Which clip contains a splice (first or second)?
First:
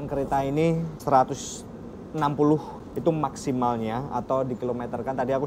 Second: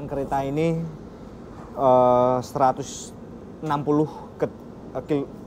first